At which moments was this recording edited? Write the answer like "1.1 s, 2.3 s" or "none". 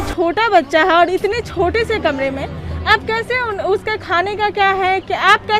none